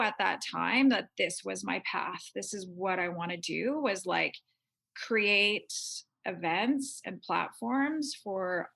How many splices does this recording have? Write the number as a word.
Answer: zero